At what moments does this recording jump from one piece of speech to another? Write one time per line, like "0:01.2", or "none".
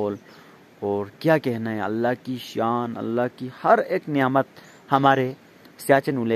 none